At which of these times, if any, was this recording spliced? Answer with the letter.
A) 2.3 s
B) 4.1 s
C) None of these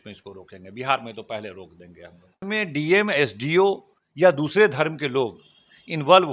A